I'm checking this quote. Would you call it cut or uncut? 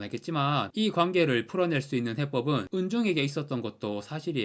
uncut